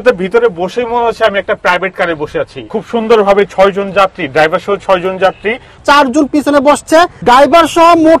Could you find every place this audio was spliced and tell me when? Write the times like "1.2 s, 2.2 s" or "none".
2.6 s, 5.8 s, 7.2 s